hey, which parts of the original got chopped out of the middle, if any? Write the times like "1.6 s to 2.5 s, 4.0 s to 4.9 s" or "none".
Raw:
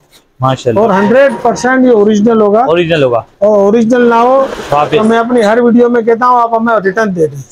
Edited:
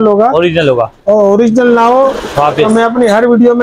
none